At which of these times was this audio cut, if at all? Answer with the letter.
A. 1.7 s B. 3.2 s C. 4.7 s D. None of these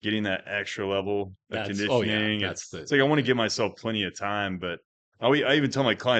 D